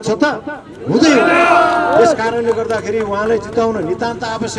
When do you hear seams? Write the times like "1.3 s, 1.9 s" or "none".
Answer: none